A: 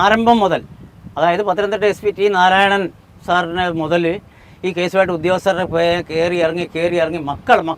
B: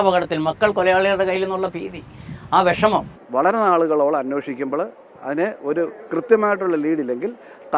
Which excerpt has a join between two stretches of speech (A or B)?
B